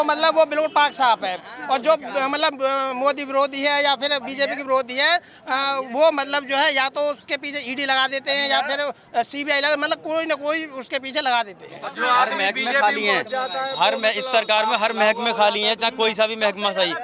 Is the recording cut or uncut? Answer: uncut